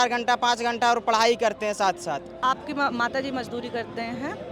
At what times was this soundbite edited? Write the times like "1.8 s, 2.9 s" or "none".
2.3 s